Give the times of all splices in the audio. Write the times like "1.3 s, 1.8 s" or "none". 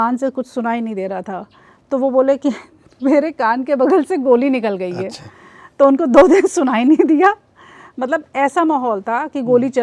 none